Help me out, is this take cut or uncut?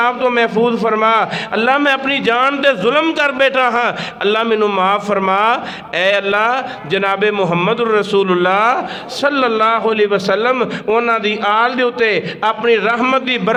uncut